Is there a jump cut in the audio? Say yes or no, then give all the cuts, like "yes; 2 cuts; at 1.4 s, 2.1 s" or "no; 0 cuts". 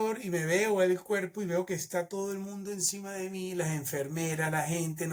no; 0 cuts